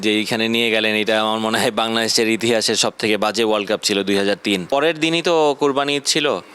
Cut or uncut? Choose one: cut